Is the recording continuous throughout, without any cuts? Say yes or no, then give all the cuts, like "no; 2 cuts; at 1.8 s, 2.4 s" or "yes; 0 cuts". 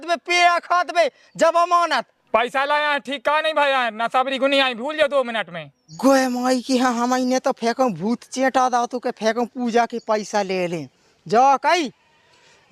yes; 0 cuts